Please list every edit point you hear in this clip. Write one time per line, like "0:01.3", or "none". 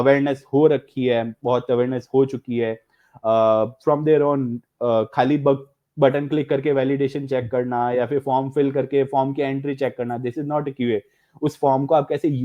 none